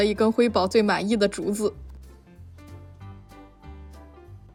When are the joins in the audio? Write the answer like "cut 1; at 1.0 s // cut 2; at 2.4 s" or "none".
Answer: none